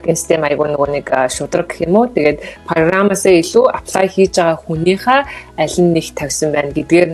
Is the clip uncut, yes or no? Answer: yes